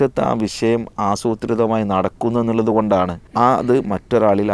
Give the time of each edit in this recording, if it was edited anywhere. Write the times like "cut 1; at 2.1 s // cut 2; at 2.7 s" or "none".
cut 1; at 3.2 s

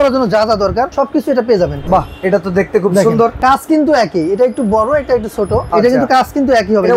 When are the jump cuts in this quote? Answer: cut 1; at 0.9 s // cut 2; at 1.8 s // cut 3; at 3.4 s // cut 4; at 5.7 s

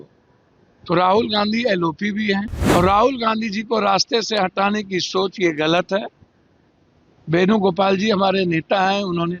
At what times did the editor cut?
cut 1; at 2.6 s

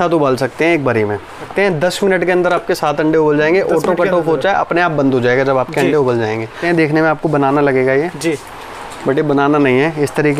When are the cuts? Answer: cut 1; at 1.5 s // cut 2; at 6.5 s

